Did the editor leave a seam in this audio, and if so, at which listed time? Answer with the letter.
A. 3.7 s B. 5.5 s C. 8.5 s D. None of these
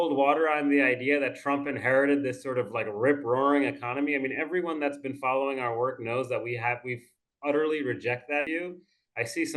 C